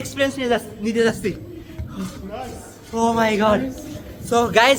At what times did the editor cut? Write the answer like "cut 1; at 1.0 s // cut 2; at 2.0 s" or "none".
none

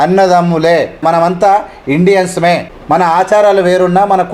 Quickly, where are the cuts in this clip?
cut 1; at 1.0 s // cut 2; at 2.7 s

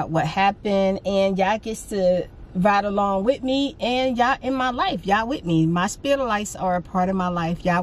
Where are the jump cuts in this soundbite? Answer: none

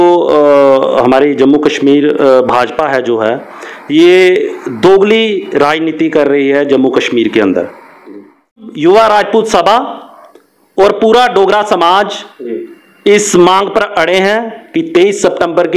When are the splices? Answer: cut 1; at 8.7 s

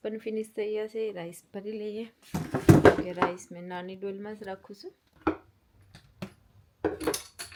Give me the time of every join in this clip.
none

